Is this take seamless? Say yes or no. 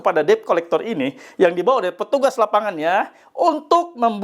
yes